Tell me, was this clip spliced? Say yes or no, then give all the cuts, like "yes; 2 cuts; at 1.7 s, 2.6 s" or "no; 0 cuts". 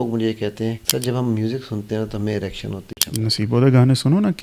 yes; 2 cuts; at 0.8 s, 2.9 s